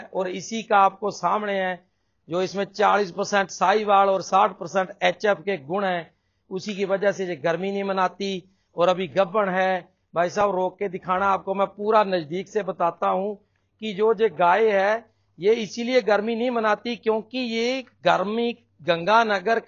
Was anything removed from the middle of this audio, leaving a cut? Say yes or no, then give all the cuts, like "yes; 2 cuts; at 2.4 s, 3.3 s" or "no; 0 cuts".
no; 0 cuts